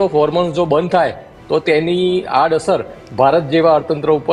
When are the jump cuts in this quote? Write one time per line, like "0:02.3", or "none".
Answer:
none